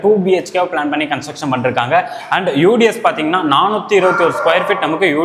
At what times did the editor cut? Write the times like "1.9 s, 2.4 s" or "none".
none